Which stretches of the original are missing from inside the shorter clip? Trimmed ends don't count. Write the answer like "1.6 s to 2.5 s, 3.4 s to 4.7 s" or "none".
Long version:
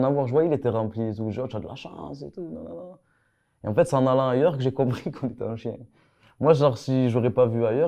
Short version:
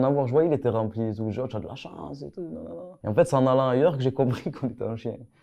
2.9 s to 3.5 s